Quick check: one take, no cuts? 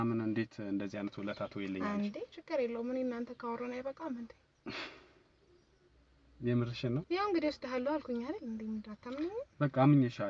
yes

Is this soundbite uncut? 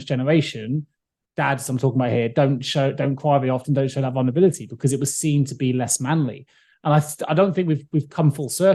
yes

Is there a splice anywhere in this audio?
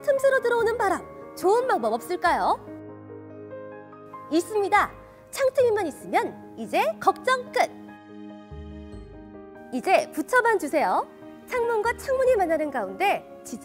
yes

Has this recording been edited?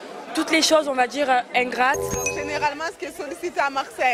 yes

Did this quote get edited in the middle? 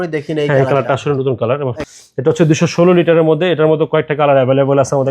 yes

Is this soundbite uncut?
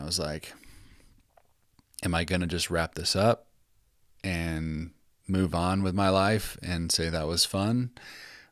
yes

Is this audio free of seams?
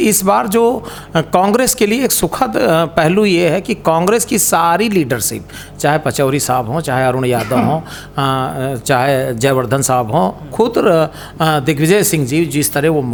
yes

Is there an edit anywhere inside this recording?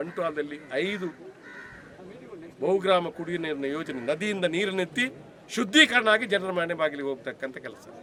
no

